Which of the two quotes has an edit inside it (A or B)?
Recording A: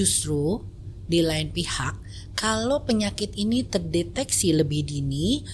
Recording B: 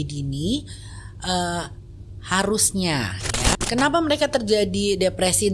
B